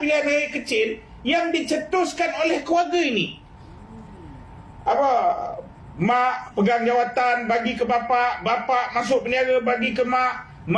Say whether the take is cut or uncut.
uncut